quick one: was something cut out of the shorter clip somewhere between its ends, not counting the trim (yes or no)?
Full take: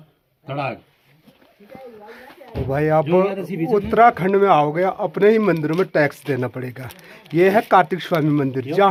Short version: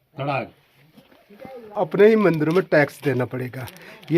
yes